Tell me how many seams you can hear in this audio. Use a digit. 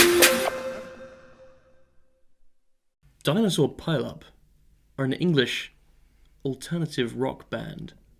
0